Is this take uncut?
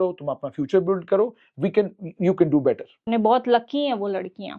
no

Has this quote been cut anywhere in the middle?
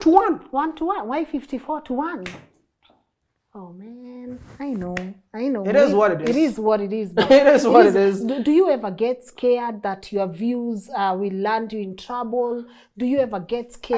no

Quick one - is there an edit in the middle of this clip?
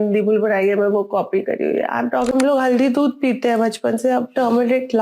yes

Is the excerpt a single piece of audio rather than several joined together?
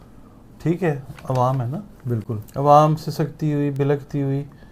yes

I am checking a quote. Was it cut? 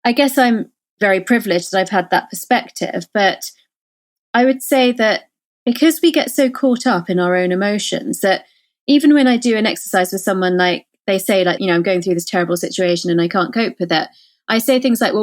yes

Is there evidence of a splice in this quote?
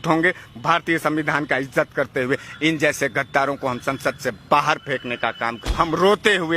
yes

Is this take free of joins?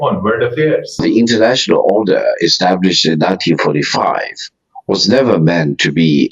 no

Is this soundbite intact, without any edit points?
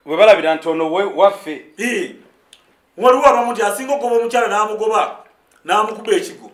yes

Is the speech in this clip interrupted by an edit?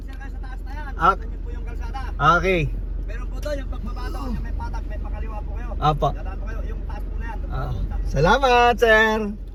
no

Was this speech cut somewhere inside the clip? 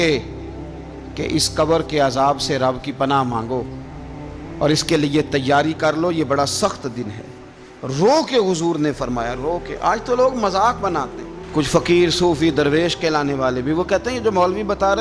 no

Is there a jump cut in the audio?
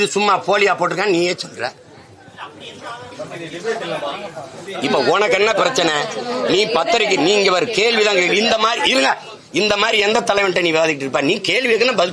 no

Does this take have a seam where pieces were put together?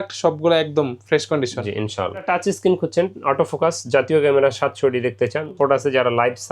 yes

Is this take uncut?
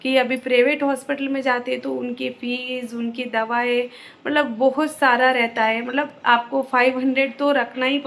yes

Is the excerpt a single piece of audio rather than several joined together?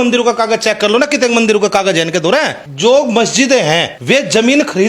no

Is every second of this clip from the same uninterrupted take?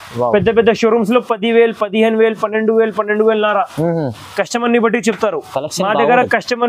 yes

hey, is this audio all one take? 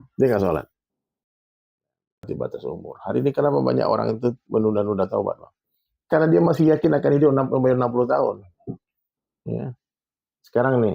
no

